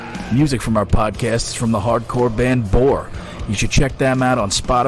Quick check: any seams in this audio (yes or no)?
no